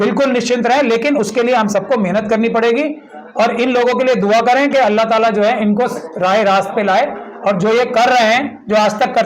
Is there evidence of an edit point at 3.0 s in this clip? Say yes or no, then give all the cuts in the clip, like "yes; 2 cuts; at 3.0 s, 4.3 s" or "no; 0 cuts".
no; 0 cuts